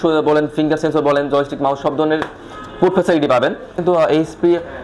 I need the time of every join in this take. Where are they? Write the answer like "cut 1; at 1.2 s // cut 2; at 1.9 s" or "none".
cut 1; at 3.8 s

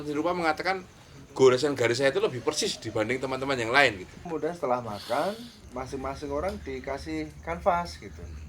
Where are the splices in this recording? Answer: cut 1; at 4.3 s

